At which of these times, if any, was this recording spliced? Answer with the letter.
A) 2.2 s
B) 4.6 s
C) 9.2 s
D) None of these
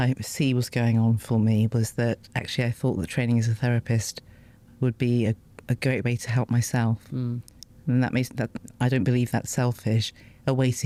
D